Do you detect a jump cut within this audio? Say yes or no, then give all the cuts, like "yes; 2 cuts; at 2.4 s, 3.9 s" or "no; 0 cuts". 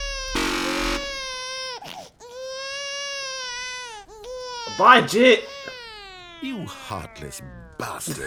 no; 0 cuts